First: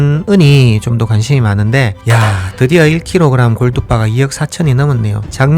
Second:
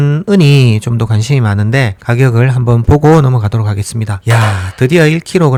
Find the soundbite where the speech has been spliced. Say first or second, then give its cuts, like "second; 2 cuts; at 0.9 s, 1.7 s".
first; 1 cut; at 2.0 s